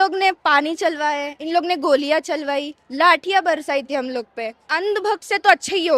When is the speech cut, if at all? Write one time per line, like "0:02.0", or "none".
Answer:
0:04.7